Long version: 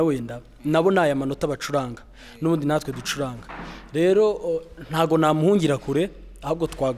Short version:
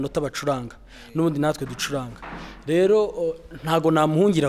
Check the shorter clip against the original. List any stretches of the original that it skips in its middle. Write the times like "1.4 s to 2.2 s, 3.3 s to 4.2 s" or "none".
none